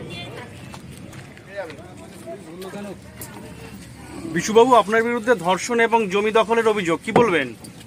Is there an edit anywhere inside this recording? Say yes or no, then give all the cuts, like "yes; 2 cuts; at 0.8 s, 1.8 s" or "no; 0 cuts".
no; 0 cuts